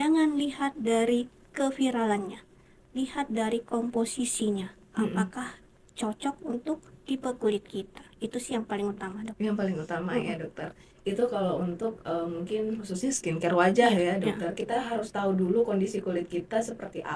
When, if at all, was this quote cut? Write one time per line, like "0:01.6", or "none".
none